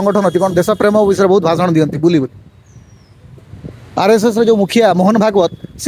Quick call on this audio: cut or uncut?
uncut